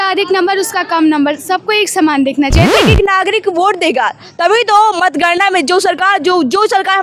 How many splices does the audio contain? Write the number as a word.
one